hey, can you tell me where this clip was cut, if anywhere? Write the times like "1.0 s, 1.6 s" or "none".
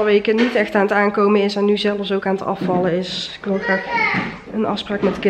none